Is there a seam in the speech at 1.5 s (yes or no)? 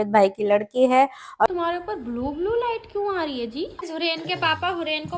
yes